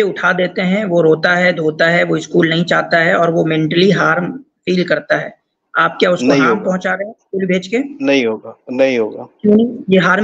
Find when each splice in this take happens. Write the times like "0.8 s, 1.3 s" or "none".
none